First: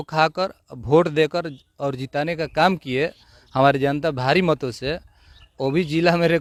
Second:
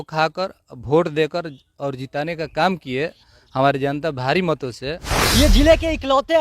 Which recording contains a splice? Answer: second; 1 cut; at 5.1 s

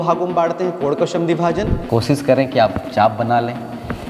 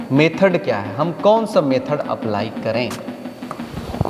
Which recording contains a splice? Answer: first; 1 cut; at 1.8 s

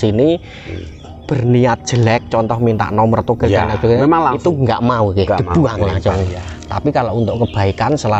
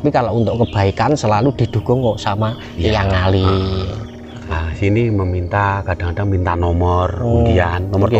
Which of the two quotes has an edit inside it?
second; 1 cut; at 4.6 s

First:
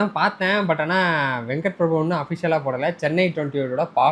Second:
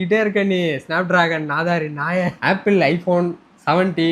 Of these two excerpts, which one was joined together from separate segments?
second; 1 cut; at 2.3 s

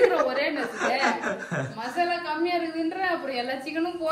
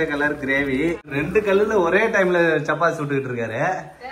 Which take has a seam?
second; 1 cut; at 1.1 s

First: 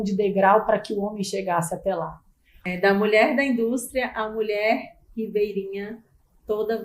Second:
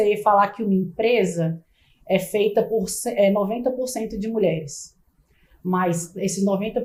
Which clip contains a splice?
first; 1 cut; at 2.6 s

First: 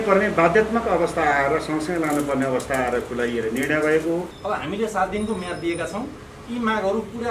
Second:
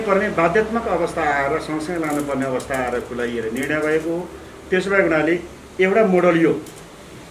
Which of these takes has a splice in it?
first; 1 cut; at 4.3 s

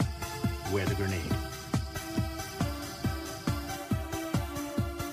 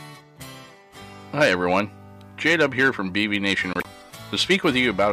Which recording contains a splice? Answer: second; 1 cut; at 3.8 s

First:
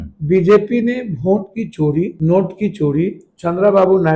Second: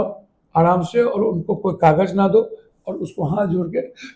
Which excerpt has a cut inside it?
first; 2 cuts; at 2.1 s, 3.3 s

